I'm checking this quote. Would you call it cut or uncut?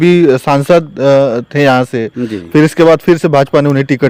uncut